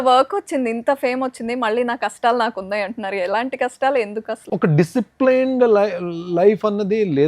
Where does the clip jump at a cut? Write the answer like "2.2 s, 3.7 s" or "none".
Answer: 4.4 s